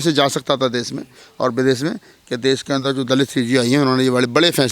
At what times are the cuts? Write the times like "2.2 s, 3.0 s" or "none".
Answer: none